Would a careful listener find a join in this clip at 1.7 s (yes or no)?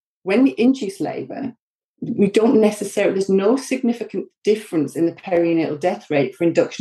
no